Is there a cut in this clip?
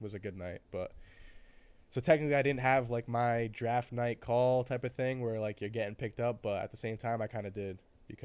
no; 0 cuts

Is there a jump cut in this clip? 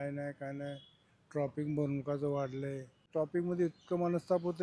yes; 1 cut; at 3.1 s

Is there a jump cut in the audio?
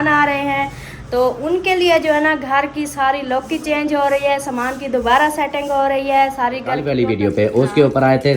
yes; 1 cut; at 6.8 s

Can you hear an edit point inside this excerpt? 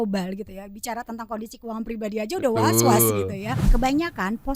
yes; 1 cut; at 3.6 s

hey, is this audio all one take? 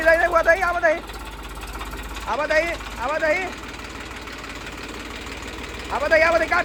yes; 0 cuts

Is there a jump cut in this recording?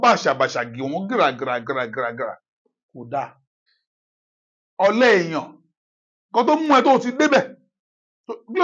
yes; 1 cut; at 3.5 s

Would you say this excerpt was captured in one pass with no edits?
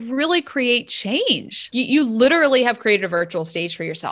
no; 1 cut; at 1.7 s

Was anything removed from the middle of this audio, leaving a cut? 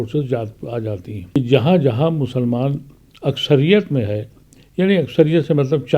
yes; 1 cut; at 1.4 s

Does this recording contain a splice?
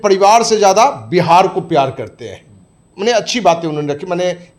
no; 0 cuts

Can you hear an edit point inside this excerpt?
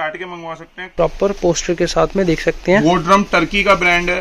yes; 1 cut; at 0.9 s

